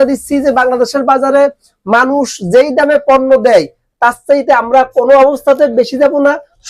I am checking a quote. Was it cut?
no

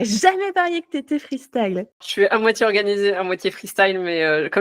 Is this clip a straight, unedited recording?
no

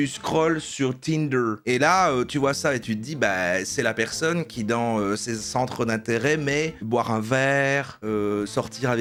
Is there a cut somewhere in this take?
no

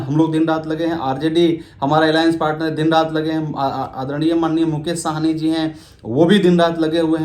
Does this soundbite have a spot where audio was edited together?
no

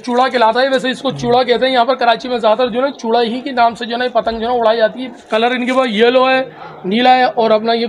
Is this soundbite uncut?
no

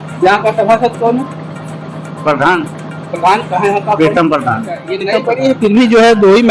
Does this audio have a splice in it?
yes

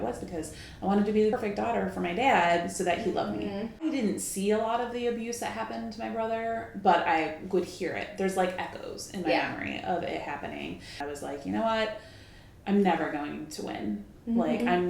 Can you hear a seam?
yes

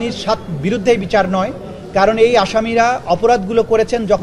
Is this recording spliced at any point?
no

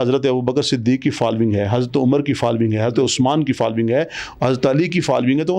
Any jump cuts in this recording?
no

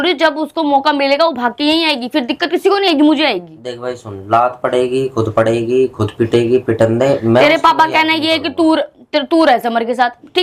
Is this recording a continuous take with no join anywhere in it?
yes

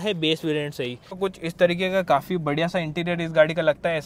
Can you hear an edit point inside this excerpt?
yes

